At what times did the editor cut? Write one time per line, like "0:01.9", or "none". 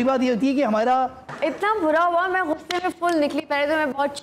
0:01.3